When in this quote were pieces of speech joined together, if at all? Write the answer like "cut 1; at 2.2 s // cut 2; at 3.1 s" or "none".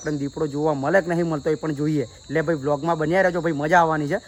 none